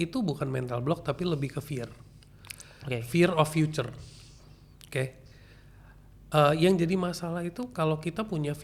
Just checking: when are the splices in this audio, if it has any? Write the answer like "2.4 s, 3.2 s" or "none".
none

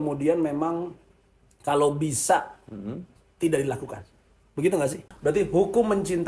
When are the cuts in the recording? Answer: 5.1 s

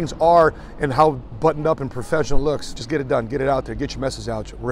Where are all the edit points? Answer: 2.7 s

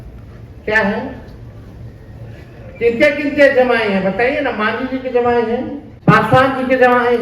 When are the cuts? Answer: 5.8 s

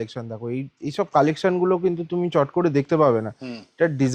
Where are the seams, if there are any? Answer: none

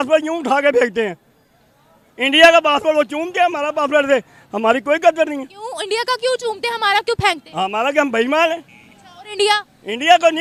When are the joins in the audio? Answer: none

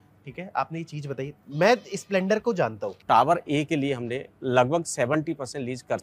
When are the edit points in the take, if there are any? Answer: 2.9 s

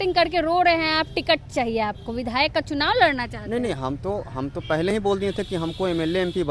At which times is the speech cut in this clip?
none

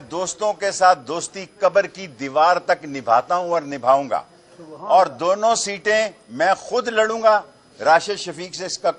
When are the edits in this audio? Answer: none

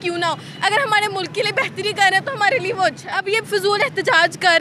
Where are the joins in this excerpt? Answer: 3.1 s

